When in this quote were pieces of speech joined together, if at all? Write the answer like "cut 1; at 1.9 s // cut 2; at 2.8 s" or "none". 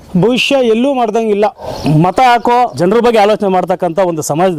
cut 1; at 1.7 s // cut 2; at 2.7 s